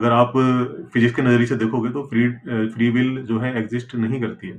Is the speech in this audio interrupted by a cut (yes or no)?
no